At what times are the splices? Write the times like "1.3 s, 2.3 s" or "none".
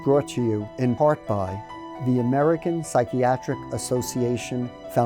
1.6 s